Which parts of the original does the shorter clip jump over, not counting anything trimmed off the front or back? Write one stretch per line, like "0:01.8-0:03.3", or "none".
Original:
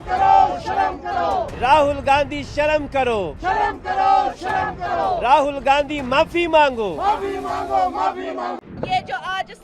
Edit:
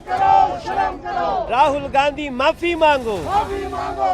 0:01.5-0:05.2

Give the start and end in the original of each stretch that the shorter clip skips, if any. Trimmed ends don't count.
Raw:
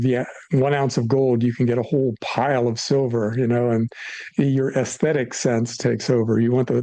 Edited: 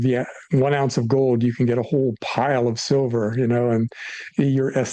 none

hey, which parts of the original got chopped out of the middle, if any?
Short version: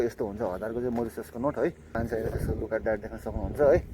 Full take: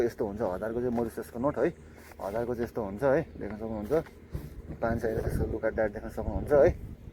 0:02.0-0:04.9

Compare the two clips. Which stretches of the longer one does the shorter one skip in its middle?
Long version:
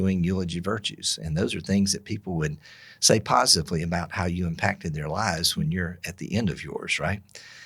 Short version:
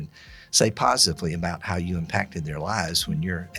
none

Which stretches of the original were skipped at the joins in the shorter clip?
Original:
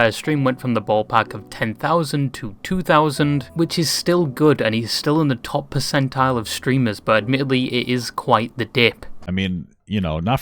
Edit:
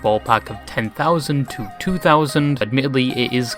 0:03.5-0:07.2

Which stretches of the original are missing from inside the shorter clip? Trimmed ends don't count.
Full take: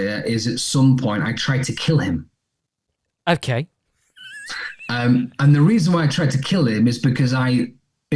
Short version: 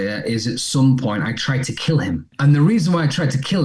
0:02.3-0:05.3

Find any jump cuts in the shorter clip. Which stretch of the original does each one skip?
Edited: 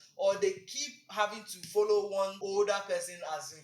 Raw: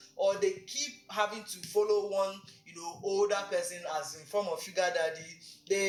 0:02.4-0:03.0

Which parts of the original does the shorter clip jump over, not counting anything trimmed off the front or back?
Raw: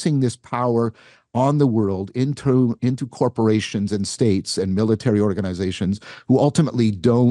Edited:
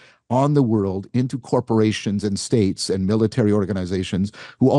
0:02.1-0:02.8

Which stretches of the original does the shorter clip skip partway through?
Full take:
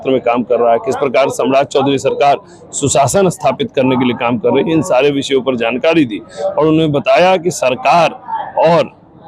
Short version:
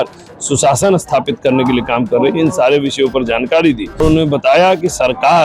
0:06.3-0:06.6

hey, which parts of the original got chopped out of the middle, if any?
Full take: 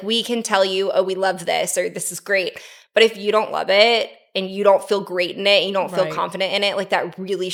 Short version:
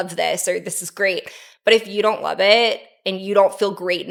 none

